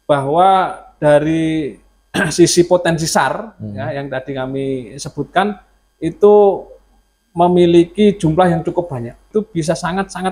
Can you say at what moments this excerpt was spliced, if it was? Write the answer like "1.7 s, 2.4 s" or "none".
9.2 s